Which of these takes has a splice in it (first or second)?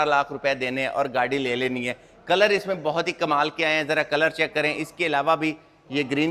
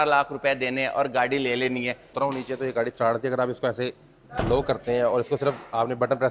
second